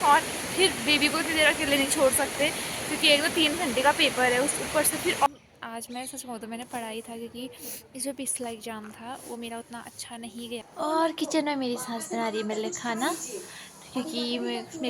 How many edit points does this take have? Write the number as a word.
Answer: two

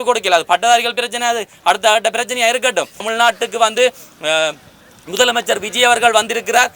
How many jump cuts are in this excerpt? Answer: one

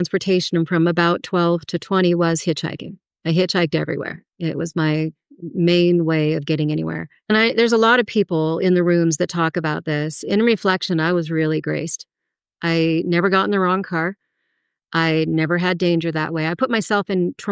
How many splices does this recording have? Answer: one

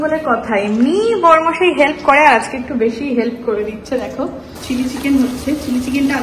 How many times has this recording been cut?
one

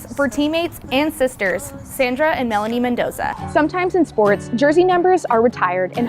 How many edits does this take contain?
one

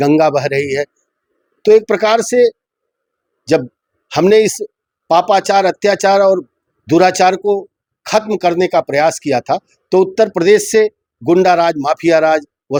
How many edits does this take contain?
zero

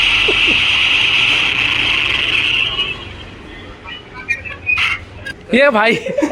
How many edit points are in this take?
one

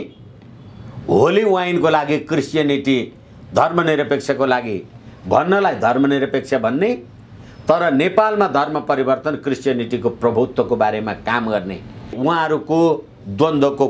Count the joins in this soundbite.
one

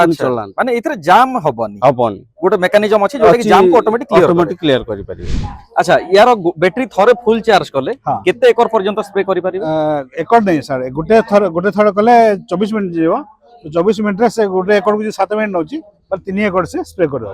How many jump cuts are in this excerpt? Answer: one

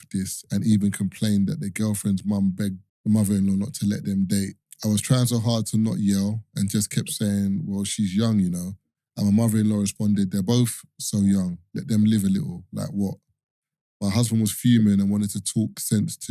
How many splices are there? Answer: two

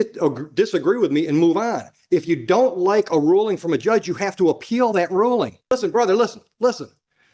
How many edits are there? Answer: one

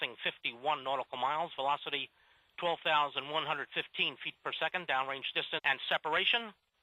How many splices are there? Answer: zero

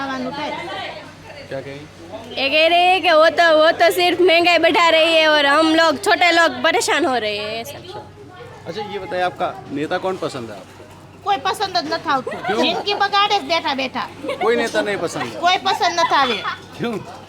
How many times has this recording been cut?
zero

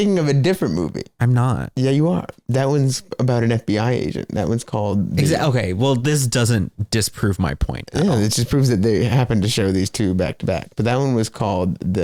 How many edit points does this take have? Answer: zero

